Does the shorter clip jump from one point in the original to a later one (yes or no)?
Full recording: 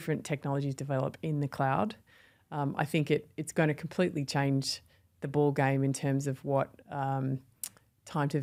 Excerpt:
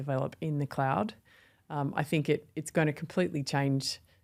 no